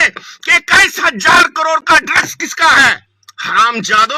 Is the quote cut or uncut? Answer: cut